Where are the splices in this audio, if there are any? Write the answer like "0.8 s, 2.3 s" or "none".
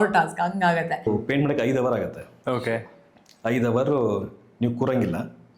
1.1 s

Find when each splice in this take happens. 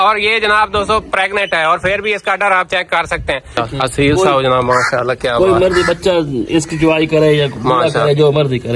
3.6 s

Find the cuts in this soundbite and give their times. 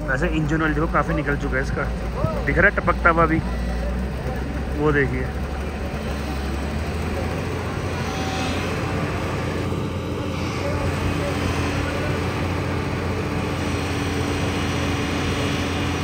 none

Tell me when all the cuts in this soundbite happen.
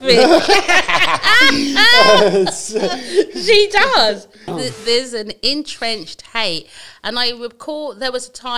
4.5 s

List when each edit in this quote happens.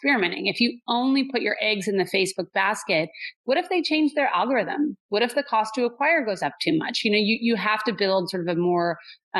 none

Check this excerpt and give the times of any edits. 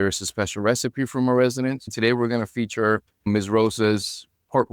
1.9 s, 3.3 s

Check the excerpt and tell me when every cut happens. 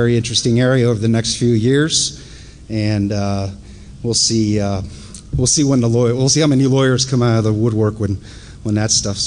3.6 s

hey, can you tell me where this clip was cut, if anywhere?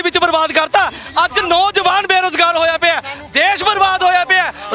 none

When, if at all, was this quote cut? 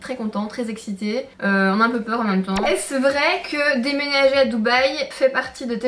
2.6 s

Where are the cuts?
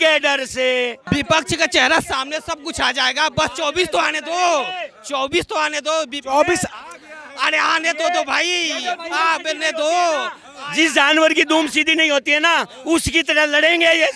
1.0 s

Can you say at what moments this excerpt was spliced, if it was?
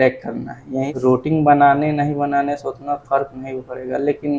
0.9 s

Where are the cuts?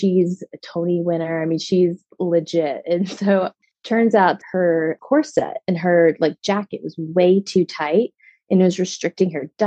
3.5 s, 4.4 s

